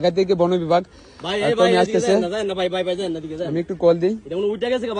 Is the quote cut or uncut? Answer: uncut